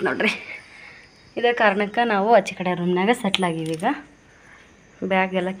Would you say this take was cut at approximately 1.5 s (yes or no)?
no